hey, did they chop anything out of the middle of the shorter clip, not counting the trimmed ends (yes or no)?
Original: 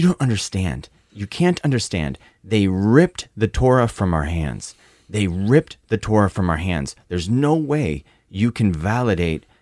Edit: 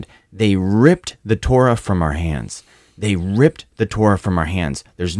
no